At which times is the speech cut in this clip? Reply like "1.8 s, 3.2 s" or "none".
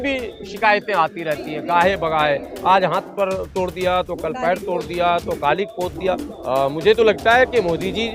6.3 s